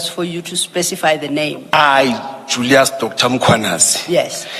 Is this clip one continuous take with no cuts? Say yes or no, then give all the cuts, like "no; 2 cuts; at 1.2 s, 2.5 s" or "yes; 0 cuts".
no; 1 cut; at 1.6 s